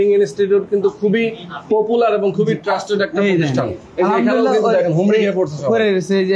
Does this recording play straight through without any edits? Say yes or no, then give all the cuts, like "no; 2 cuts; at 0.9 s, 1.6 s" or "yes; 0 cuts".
yes; 0 cuts